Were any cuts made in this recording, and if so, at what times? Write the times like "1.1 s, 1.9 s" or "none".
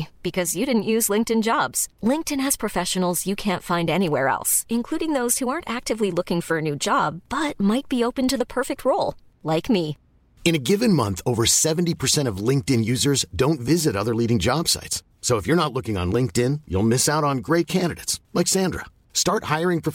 none